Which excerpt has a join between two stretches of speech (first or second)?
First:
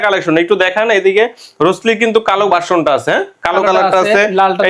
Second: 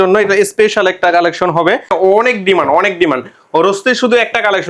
second